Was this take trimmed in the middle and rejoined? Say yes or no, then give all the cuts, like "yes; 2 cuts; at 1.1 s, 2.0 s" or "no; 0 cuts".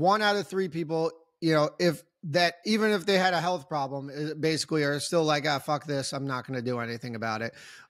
no; 0 cuts